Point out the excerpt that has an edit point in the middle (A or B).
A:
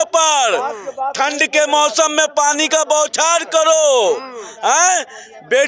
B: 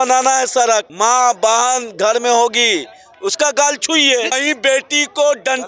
B